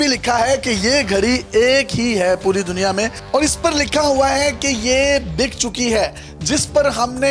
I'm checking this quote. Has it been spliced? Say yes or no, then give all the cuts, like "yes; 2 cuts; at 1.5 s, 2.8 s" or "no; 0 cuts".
no; 0 cuts